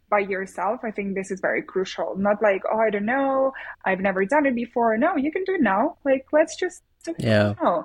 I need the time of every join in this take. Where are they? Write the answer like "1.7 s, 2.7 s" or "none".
none